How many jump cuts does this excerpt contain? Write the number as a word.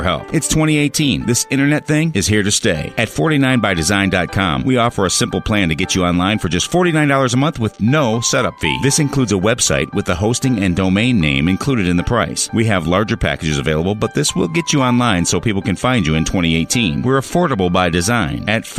zero